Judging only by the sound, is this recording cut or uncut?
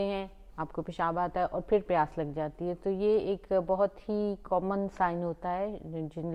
uncut